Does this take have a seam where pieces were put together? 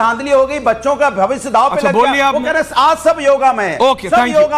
no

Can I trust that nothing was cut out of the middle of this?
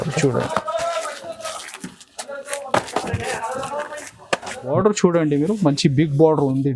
no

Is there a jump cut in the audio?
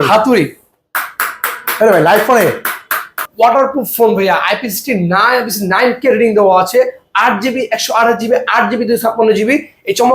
yes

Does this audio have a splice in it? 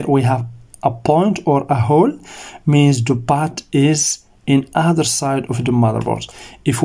no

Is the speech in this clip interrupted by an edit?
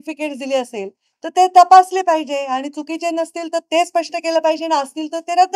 no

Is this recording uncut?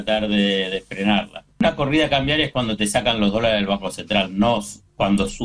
no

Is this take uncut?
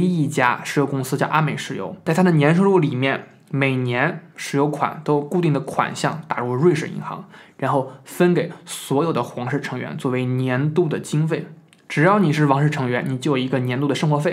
no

